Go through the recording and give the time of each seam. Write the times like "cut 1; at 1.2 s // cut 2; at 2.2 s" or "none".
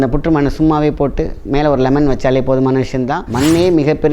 cut 1; at 3.2 s